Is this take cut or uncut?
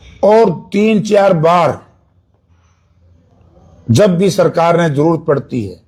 uncut